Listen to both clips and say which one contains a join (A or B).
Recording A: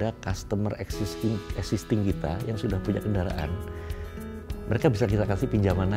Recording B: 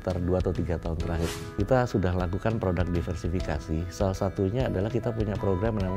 B